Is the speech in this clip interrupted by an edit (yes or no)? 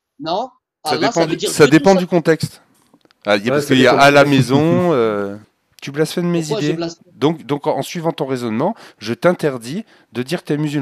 yes